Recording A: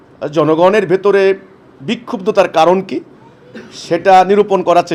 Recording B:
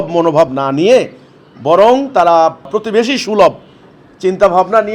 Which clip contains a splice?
B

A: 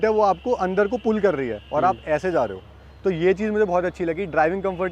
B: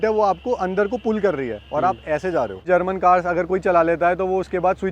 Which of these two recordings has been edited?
B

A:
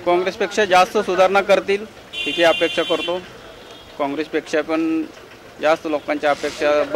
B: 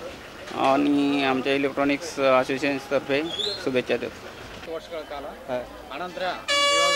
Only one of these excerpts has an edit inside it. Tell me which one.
B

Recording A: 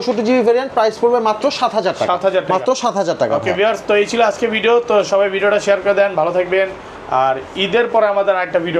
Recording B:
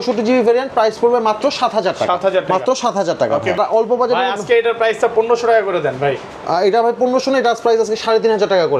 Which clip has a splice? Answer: B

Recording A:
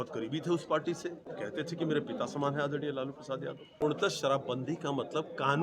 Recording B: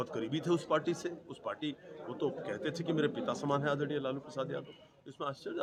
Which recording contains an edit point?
A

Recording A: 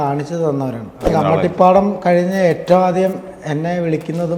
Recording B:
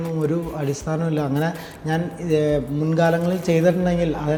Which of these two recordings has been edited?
A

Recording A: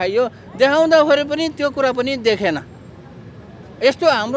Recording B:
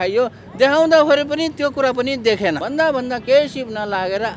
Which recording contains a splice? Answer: B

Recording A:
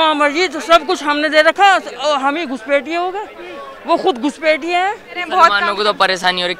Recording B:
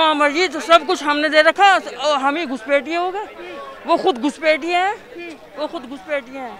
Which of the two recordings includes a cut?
A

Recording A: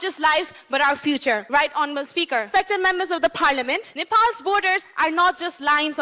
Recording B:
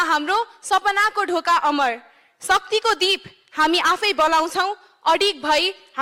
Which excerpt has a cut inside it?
A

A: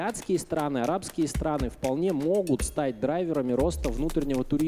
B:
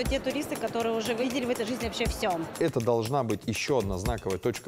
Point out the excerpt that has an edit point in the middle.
B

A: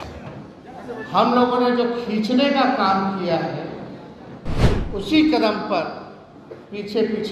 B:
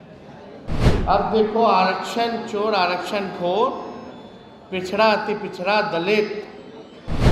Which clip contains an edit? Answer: A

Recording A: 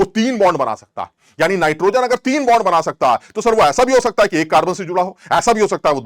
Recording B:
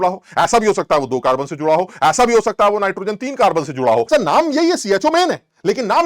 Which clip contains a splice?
B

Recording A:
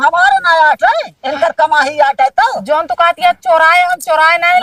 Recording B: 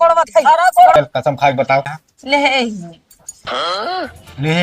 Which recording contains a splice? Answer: B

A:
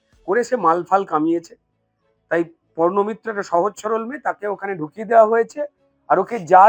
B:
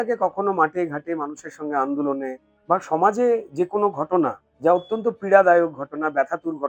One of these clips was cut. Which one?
B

